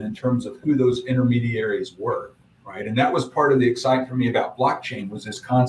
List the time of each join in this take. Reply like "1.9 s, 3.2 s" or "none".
none